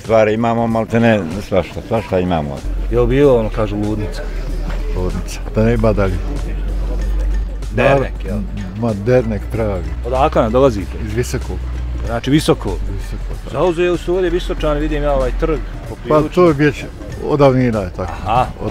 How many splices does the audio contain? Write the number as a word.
one